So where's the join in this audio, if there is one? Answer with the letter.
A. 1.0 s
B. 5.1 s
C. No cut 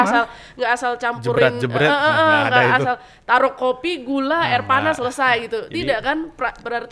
C